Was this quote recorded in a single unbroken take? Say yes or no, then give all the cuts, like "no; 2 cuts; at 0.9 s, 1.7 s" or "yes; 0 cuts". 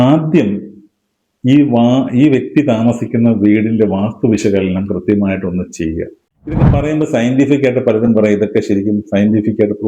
no; 1 cut; at 6.7 s